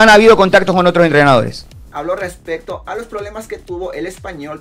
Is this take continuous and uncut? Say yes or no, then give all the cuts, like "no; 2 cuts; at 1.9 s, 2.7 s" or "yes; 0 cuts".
no; 1 cut; at 1.8 s